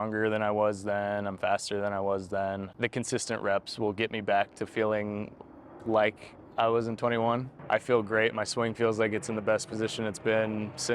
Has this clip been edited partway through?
yes; 2 cuts; at 2.7 s, 7.5 s

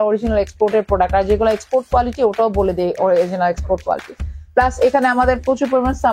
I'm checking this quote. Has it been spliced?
no; 0 cuts

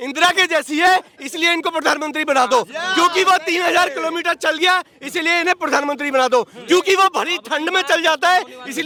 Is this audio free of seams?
yes; 0 cuts

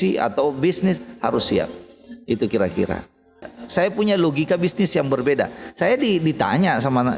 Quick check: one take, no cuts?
no; 1 cut; at 3.6 s

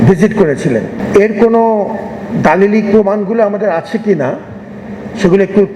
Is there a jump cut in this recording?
yes; 1 cut; at 1.0 s

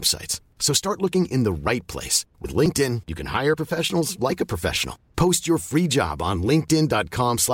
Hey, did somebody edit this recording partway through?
no; 0 cuts

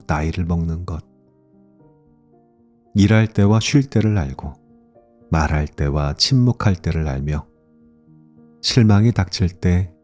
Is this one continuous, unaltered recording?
no; 2 cuts; at 1.5 s, 2.9 s

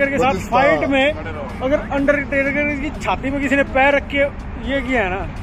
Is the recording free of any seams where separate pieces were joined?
yes; 0 cuts

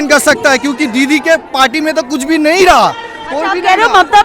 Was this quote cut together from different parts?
no; 0 cuts

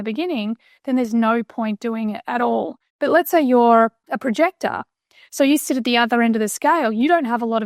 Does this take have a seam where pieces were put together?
yes; 2 cuts; at 2.8 s, 4.1 s

